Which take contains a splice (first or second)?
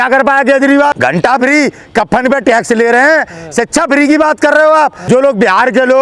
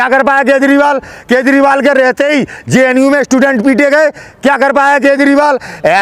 first